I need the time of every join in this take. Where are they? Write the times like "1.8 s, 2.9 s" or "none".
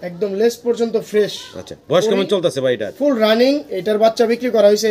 none